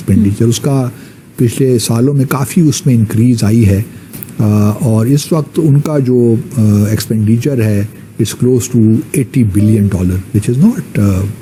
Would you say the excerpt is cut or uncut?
uncut